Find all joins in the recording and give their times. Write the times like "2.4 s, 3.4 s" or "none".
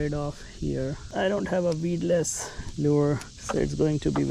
1.0 s, 3.3 s